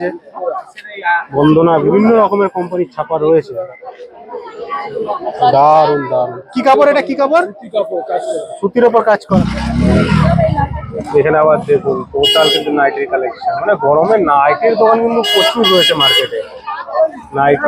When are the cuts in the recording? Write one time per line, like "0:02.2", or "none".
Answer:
0:03.7
0:09.2

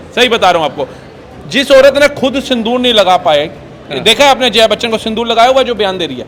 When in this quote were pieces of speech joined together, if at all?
none

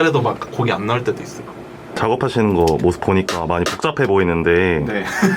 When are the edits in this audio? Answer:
0:01.9

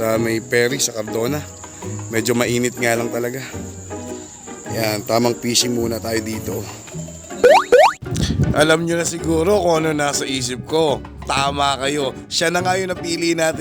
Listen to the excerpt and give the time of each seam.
none

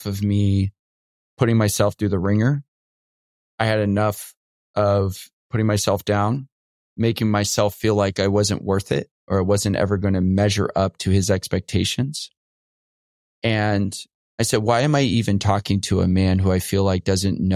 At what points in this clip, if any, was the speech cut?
0:06.8

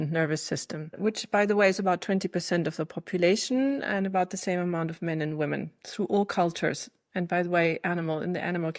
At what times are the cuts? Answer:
0:01.0

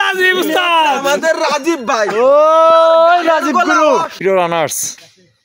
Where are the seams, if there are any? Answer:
0:04.0

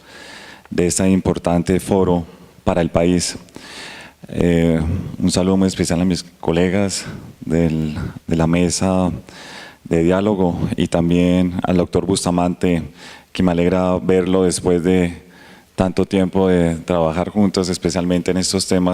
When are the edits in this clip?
0:07.7

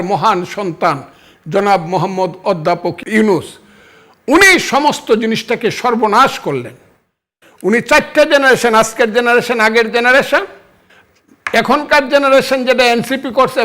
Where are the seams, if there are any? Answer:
0:03.0

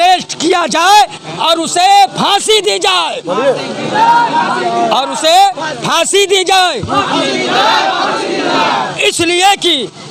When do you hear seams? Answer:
none

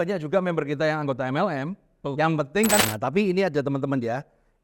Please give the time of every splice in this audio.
0:02.8

